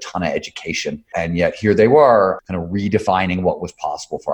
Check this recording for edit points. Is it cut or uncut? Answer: cut